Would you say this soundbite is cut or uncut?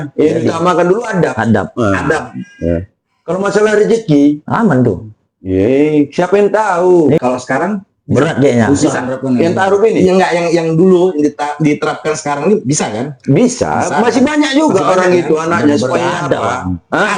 cut